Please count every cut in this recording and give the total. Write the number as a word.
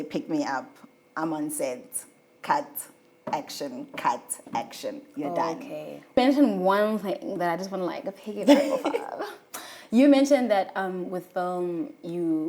one